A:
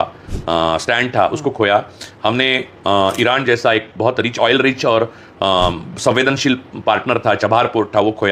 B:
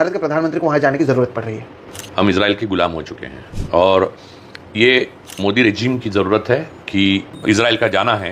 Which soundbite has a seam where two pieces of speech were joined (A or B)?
B